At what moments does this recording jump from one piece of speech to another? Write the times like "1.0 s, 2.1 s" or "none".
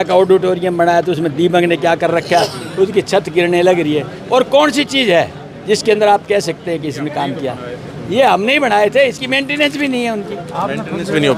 none